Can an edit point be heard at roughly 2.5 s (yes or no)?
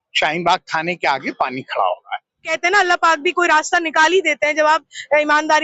yes